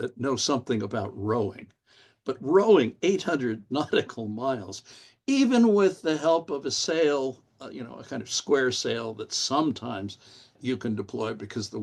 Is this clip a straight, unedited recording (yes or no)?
no